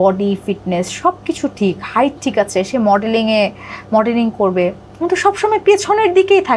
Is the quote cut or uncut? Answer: uncut